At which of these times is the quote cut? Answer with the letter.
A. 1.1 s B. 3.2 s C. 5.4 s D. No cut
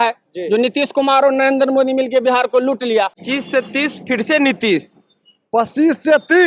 B